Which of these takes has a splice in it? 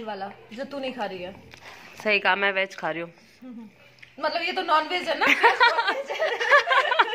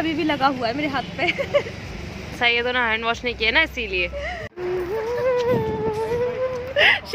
second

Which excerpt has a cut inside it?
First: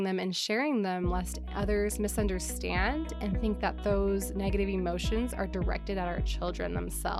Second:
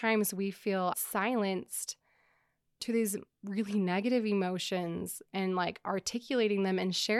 second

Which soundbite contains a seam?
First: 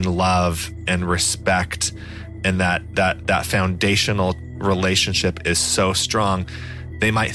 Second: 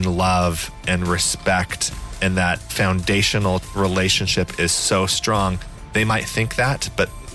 second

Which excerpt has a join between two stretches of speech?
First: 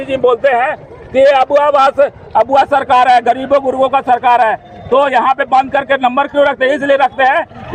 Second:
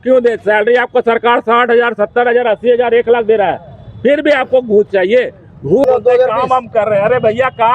second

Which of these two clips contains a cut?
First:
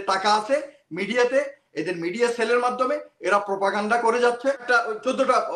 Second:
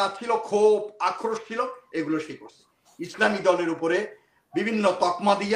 first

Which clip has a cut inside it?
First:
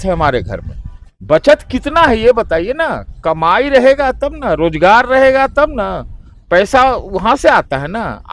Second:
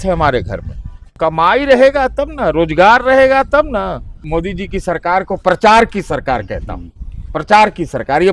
second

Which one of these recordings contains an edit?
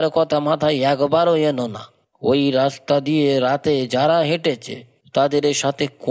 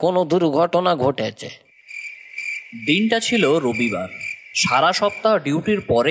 second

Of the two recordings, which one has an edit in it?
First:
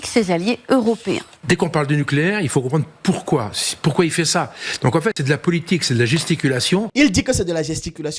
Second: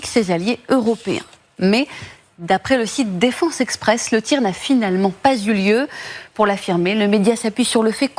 first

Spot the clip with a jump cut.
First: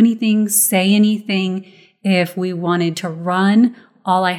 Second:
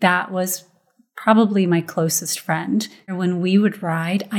second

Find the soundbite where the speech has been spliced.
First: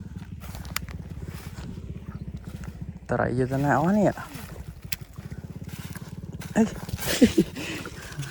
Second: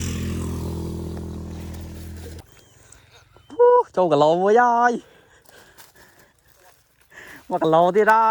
second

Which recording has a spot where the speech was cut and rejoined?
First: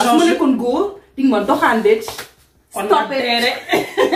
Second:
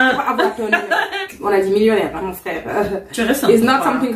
second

